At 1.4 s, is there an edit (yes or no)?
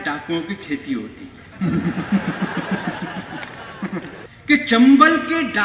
no